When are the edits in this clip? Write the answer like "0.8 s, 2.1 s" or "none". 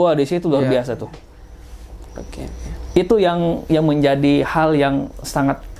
none